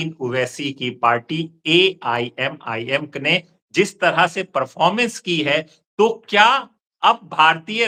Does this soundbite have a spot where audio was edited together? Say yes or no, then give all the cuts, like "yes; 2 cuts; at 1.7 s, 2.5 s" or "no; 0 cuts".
no; 0 cuts